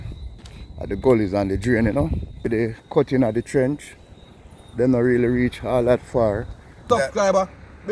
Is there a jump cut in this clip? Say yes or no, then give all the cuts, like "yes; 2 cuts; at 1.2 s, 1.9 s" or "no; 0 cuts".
yes; 2 cuts; at 2.8 s, 6.9 s